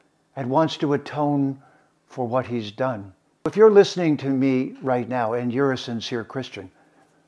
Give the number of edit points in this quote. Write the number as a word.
one